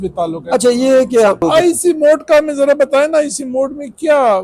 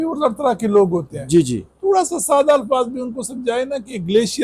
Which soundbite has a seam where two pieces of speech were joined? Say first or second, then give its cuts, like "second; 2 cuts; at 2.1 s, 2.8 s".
first; 1 cut; at 1.4 s